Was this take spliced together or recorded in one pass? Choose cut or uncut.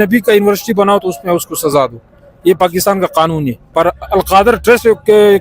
cut